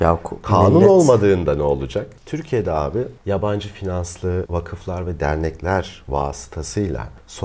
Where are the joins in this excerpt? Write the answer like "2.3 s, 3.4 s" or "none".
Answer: 2.2 s, 4.5 s